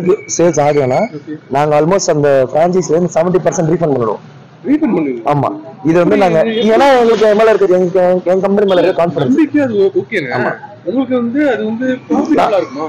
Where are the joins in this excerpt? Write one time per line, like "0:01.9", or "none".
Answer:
none